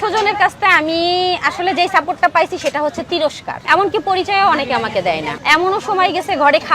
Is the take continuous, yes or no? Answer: no